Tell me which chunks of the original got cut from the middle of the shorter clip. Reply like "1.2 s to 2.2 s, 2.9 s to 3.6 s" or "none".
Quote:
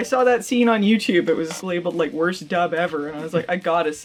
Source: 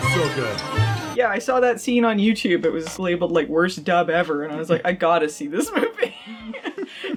none